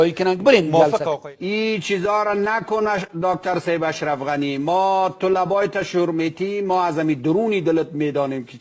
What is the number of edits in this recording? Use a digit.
1